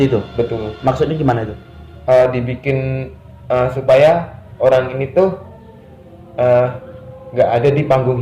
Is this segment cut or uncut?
uncut